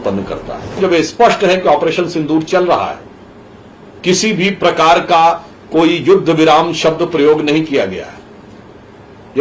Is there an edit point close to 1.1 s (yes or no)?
yes